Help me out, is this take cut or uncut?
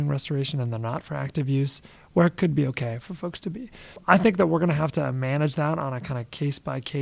cut